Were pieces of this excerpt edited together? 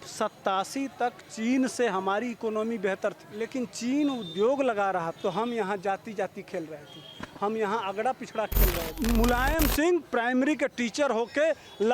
yes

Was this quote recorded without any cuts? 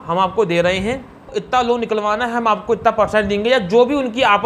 no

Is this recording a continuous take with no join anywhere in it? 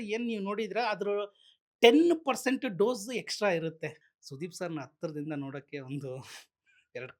no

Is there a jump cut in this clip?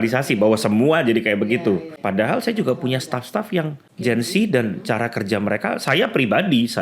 yes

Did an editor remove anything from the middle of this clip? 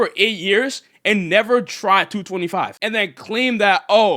no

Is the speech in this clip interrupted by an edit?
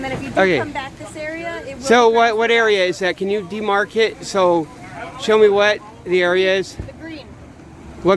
no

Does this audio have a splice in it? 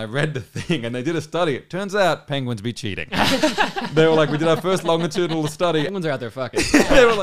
yes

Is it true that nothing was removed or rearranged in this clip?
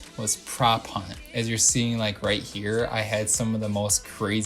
no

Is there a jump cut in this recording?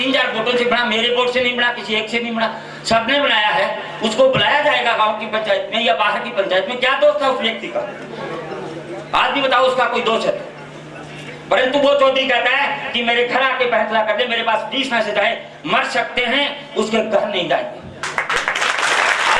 no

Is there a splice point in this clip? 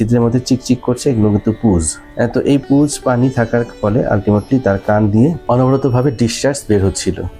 no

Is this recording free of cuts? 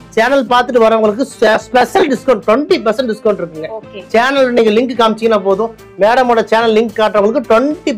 yes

